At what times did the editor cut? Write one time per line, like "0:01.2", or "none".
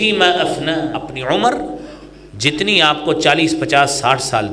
0:01.1